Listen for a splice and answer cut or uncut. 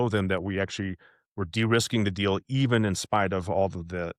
uncut